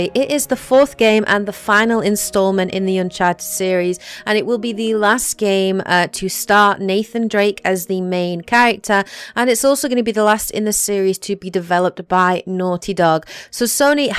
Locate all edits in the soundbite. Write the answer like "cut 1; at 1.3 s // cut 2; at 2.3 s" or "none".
none

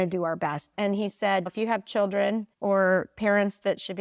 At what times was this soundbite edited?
cut 1; at 0.7 s // cut 2; at 2.5 s

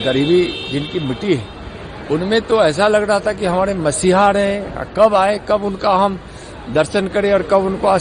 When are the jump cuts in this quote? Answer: none

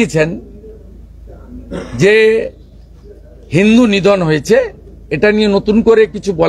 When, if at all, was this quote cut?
none

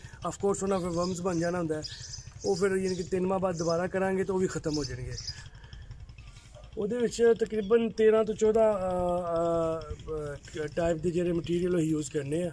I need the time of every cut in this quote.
cut 1; at 5.4 s

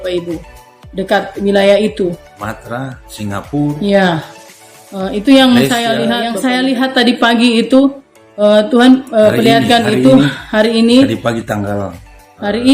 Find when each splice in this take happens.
cut 1; at 6.3 s

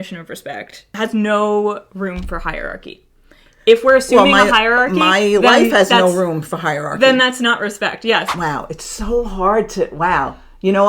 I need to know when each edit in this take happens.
cut 1; at 0.9 s // cut 2; at 8.3 s

